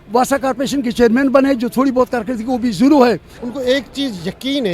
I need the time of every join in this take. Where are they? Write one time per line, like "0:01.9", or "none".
0:03.3